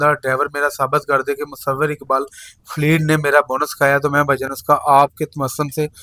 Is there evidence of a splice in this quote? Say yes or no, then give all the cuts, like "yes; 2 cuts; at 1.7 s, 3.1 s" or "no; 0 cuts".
no; 0 cuts